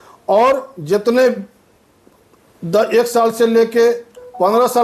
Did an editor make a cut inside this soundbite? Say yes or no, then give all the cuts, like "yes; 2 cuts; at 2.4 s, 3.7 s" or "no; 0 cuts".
no; 0 cuts